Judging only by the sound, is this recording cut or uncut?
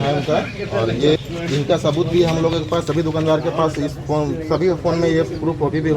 cut